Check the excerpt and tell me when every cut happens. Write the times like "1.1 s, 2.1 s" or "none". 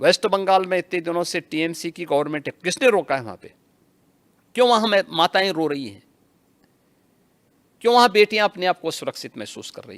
none